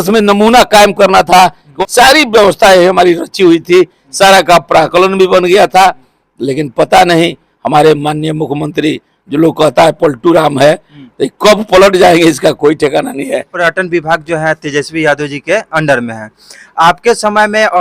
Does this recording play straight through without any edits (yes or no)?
no